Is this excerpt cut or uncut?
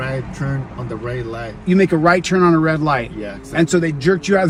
uncut